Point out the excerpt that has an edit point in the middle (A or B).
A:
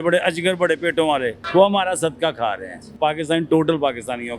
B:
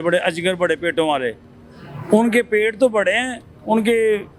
A